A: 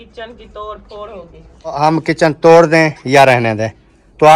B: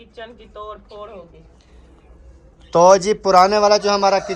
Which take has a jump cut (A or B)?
A